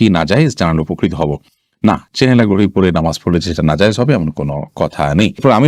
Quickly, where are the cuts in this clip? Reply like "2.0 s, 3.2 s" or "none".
none